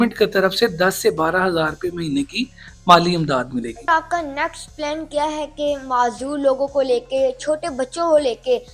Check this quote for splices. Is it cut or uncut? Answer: cut